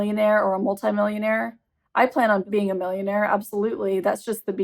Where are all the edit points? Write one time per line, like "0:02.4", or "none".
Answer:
0:02.4